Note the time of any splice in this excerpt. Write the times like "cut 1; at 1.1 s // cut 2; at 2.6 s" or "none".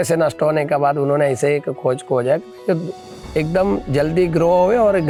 none